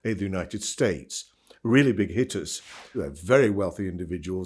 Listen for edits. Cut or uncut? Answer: cut